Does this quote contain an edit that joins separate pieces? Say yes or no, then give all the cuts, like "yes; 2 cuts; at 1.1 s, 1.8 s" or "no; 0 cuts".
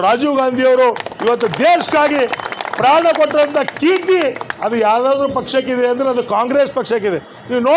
no; 0 cuts